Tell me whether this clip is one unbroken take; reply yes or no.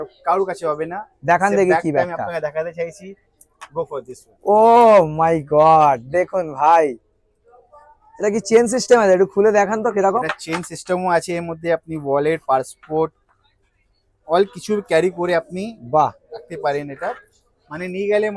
yes